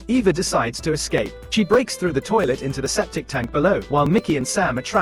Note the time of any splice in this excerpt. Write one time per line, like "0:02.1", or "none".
0:01.4